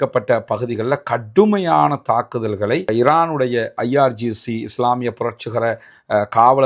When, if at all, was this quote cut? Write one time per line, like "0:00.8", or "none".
none